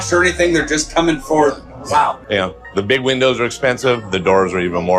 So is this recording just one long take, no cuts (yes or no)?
yes